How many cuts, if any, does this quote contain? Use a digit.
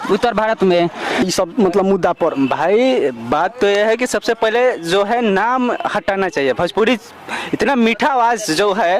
1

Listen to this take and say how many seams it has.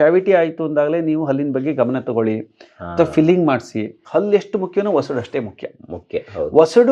1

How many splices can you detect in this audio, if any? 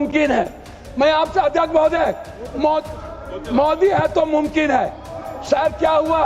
0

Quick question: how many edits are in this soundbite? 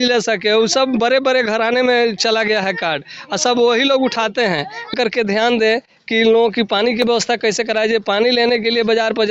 1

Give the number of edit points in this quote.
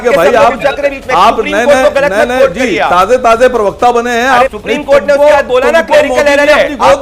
1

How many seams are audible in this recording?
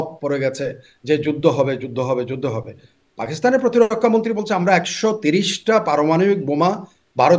0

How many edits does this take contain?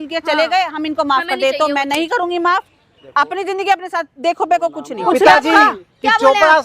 1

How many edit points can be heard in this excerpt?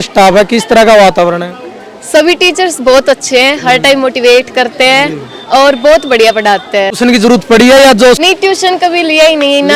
2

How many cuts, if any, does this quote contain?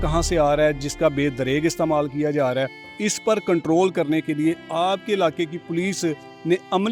0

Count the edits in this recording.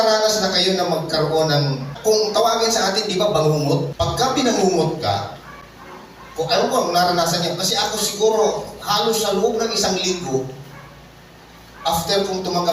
2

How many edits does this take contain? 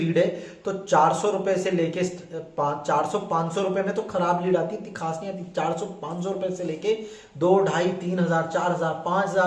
0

